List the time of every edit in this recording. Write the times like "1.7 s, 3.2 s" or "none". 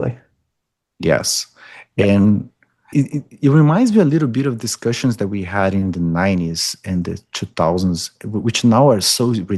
2.9 s